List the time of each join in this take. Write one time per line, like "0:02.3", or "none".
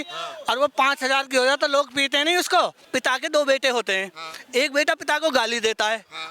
0:02.8